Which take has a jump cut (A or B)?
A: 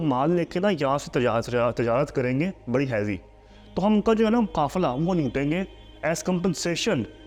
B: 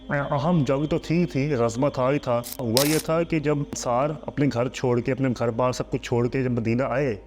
B